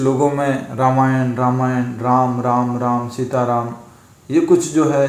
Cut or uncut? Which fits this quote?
uncut